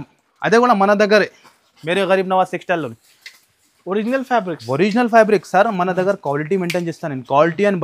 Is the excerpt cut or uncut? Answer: uncut